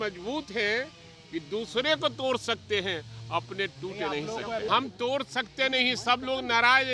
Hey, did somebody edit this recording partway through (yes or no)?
yes